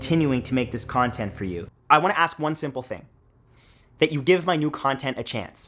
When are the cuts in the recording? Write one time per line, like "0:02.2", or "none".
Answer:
0:01.6